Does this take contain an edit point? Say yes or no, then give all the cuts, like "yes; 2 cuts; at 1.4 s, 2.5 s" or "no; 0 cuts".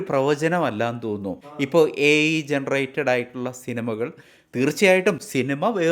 yes; 1 cut; at 1.4 s